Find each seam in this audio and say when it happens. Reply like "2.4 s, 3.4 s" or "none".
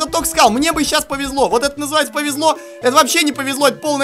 none